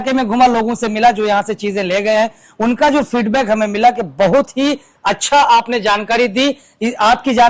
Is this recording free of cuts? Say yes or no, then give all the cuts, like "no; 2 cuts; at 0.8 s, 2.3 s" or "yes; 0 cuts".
yes; 0 cuts